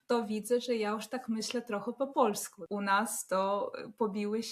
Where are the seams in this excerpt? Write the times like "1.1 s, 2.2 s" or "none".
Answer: 2.5 s